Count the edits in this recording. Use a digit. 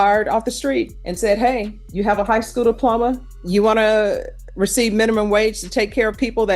3